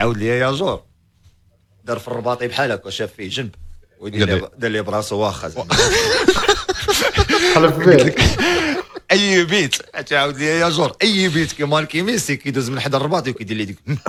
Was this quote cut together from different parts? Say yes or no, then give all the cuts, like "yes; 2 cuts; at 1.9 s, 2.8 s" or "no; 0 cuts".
no; 0 cuts